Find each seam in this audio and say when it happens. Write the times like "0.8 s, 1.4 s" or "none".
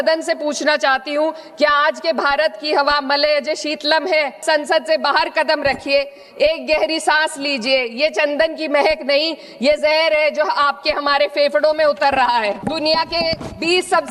4.4 s, 12.6 s